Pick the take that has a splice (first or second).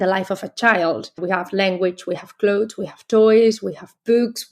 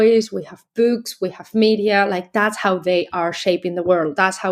first